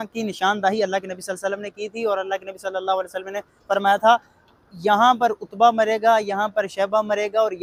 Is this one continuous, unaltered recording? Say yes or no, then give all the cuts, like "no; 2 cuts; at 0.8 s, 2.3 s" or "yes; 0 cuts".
yes; 0 cuts